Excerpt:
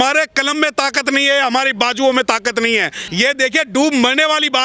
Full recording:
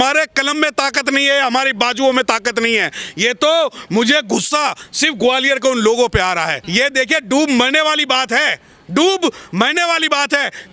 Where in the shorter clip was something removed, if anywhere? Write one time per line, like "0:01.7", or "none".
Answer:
0:03.0